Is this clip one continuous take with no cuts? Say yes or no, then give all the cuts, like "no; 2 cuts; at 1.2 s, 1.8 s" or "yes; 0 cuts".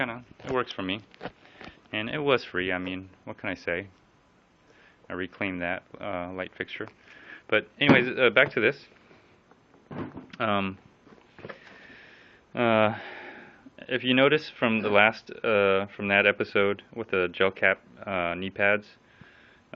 yes; 0 cuts